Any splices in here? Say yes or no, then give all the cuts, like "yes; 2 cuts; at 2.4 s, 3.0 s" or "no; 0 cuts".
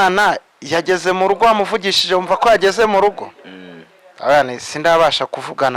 no; 0 cuts